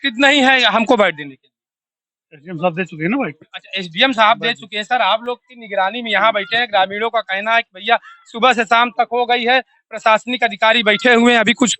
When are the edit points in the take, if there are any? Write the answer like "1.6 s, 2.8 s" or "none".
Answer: none